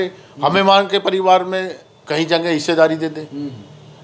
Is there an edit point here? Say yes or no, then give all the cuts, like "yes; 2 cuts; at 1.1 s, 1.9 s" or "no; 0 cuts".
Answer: no; 0 cuts